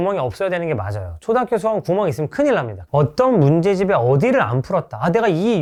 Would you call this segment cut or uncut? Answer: uncut